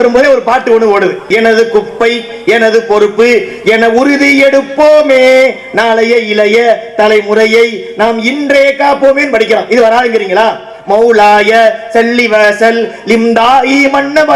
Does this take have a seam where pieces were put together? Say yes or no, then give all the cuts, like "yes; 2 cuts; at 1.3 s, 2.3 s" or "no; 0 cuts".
yes; 1 cut; at 1.3 s